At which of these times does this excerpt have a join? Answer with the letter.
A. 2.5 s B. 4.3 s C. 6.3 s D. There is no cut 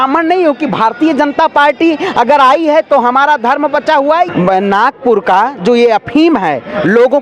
B